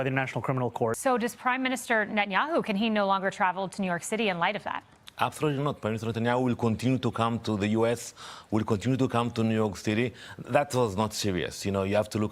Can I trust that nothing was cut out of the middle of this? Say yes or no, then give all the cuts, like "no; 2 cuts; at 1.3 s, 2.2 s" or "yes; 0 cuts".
no; 1 cut; at 1.0 s